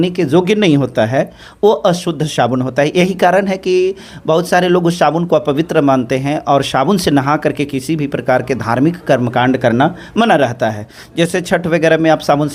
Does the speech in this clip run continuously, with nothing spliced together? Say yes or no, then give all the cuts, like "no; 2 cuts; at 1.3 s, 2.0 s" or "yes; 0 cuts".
yes; 0 cuts